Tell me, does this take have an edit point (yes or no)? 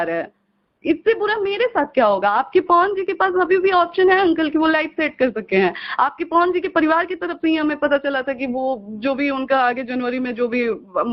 no